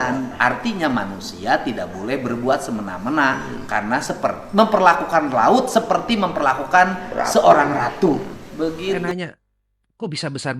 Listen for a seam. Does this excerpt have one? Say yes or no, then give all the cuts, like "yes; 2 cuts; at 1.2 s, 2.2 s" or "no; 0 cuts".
yes; 1 cut; at 9.0 s